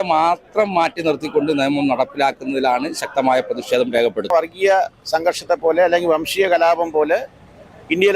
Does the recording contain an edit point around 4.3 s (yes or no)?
yes